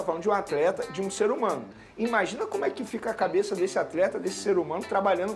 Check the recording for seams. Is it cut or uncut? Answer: uncut